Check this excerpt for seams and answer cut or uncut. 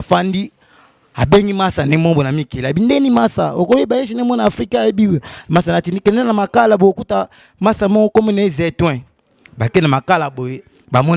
uncut